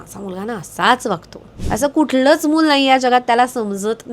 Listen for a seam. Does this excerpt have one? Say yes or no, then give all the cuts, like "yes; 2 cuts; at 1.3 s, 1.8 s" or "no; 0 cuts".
yes; 1 cut; at 1.5 s